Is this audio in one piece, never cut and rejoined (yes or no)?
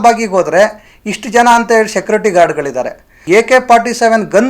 no